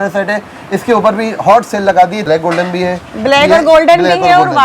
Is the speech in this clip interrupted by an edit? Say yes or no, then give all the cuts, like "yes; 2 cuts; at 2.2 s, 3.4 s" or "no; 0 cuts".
yes; 1 cut; at 2.2 s